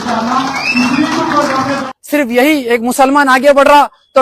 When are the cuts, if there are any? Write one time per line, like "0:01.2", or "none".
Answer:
0:01.8